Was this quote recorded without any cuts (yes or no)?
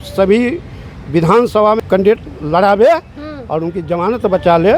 no